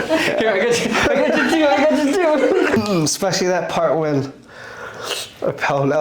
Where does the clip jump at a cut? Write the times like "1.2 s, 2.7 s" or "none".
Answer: 2.8 s